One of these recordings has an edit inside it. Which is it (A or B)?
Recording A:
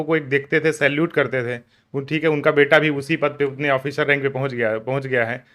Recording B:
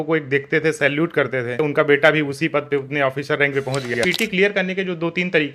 B